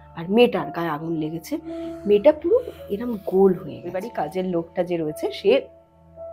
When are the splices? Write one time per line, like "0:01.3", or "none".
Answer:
0:04.1